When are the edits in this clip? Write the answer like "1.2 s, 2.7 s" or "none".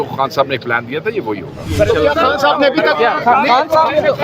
1.7 s